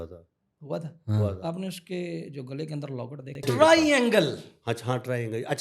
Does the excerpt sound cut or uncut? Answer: cut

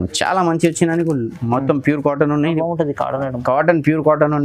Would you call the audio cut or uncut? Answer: cut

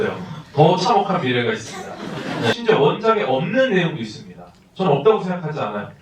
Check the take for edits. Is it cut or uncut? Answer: cut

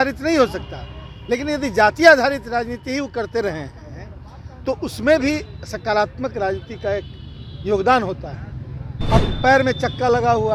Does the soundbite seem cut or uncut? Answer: uncut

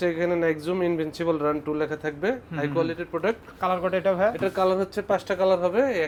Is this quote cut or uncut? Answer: uncut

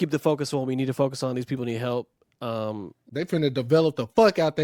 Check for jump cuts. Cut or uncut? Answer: cut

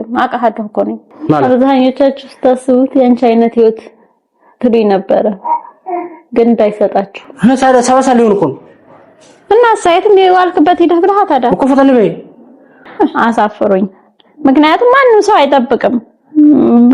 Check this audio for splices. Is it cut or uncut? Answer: cut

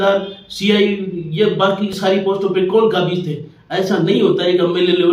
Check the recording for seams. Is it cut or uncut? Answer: uncut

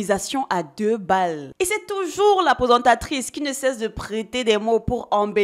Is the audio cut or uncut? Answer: uncut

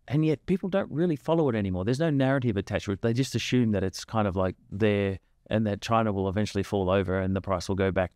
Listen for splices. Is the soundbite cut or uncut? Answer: uncut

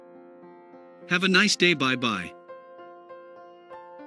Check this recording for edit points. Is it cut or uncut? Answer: uncut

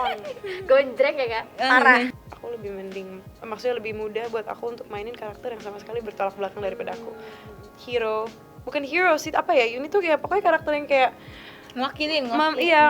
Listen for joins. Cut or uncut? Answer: cut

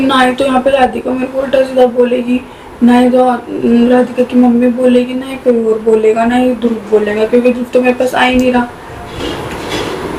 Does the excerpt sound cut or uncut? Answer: uncut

